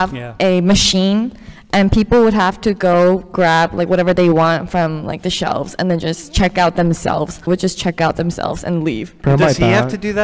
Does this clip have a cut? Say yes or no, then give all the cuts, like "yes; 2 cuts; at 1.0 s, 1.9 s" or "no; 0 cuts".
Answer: yes; 2 cuts; at 7.5 s, 9.1 s